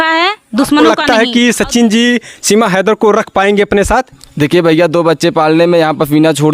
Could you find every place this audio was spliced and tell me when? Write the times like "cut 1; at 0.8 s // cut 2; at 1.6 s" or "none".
cut 1; at 1.0 s